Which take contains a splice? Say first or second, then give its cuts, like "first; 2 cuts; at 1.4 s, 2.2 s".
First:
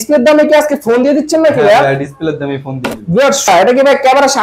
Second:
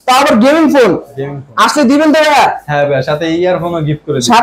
first; 1 cut; at 3.5 s